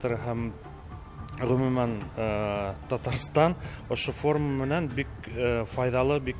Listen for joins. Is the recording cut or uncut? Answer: uncut